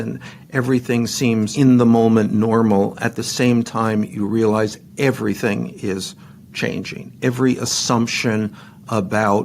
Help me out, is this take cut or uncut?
cut